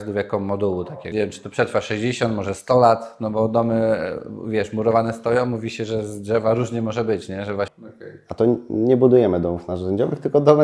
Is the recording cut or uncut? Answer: cut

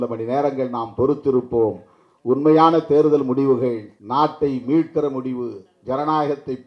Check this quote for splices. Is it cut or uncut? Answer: cut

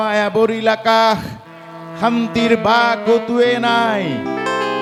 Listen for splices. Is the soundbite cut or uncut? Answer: uncut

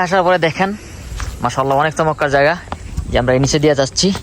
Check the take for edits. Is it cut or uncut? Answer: uncut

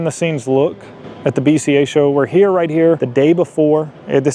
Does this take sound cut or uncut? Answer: uncut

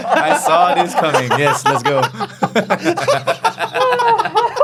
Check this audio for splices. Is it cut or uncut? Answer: uncut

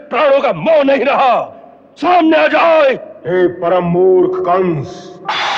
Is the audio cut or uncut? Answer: uncut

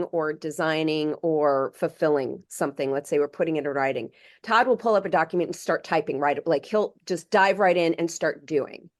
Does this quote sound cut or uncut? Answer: uncut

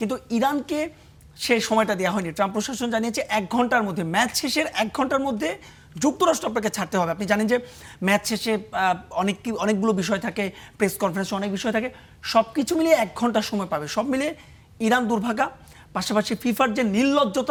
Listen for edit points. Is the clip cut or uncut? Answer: uncut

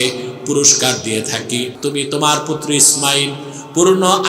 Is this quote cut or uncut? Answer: cut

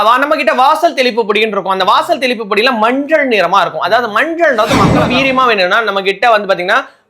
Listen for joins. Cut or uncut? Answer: cut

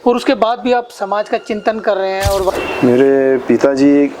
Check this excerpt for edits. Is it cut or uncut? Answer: cut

